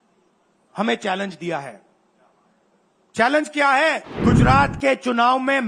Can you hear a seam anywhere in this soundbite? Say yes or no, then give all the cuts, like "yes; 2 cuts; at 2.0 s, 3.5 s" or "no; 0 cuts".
yes; 1 cut; at 4.1 s